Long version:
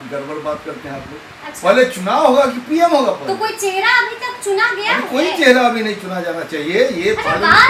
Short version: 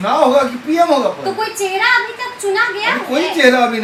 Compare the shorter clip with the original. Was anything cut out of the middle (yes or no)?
no